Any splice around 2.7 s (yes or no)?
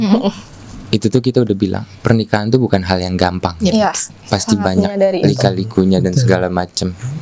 no